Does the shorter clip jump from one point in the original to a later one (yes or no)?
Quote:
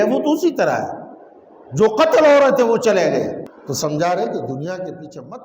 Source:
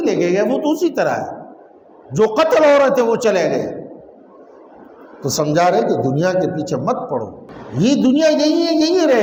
yes